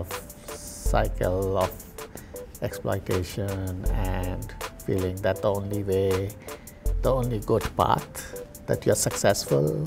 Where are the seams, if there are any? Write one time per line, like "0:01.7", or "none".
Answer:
none

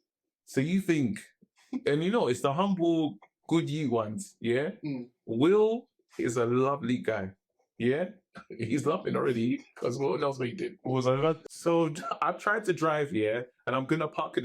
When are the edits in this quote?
0:11.5

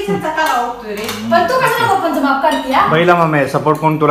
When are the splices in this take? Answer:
none

